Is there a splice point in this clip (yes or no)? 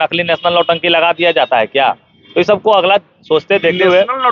no